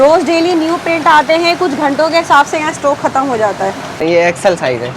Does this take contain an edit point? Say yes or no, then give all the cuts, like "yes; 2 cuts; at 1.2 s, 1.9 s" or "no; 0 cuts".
yes; 1 cut; at 4.0 s